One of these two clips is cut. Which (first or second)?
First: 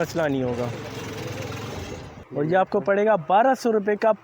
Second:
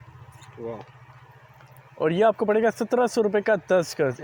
first